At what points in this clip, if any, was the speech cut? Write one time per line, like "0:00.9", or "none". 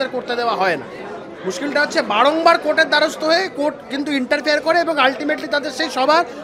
none